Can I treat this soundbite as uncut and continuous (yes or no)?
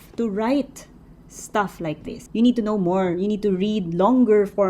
no